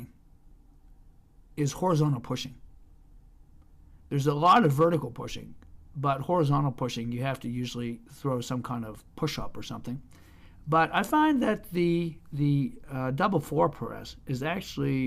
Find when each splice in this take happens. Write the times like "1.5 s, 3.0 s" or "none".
1.9 s